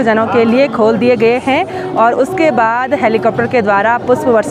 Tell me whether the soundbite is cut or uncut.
uncut